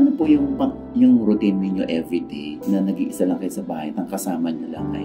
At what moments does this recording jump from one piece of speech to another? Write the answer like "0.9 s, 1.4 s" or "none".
none